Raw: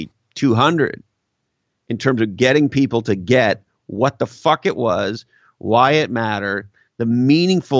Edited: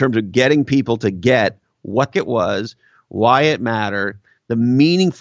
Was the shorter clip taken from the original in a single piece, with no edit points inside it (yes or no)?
no